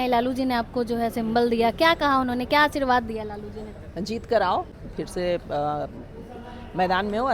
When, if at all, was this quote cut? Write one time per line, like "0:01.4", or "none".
0:04.8